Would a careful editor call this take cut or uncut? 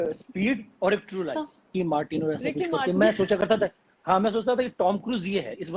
cut